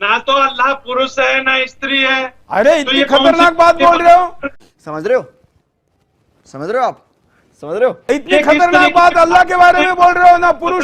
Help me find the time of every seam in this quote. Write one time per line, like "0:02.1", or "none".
none